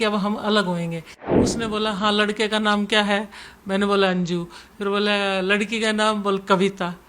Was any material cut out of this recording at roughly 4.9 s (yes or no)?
no